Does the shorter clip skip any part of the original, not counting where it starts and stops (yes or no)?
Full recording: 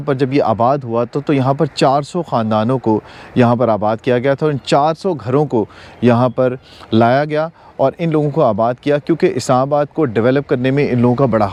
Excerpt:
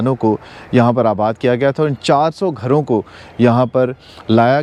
no